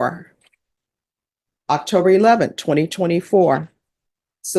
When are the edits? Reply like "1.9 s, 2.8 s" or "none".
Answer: none